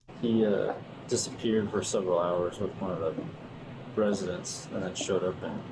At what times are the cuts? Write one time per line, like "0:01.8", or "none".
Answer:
0:00.9